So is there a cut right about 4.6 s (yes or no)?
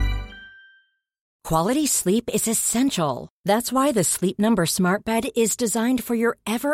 no